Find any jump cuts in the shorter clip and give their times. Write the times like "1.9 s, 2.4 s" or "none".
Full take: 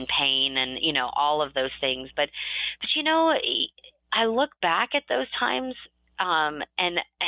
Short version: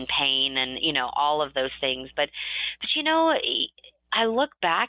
none